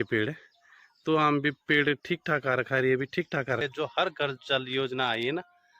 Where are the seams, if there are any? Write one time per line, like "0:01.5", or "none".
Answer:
0:03.6